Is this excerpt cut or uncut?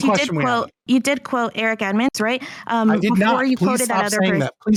uncut